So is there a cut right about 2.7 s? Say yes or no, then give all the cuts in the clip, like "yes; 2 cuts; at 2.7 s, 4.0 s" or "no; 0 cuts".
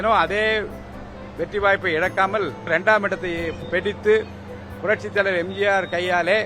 yes; 1 cut; at 2.7 s